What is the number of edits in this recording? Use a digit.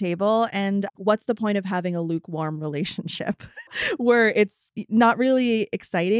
2